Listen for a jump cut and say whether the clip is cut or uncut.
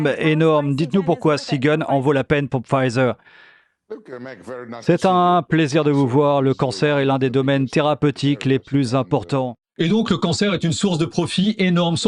uncut